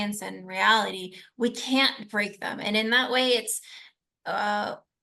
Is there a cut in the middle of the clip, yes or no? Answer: no